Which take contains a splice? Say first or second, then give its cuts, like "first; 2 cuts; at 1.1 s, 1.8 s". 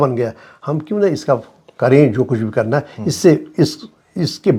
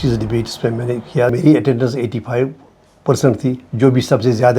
second; 1 cut; at 1.3 s